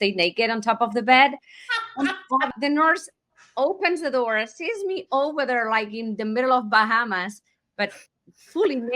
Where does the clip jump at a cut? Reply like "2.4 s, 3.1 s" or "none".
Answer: 2.5 s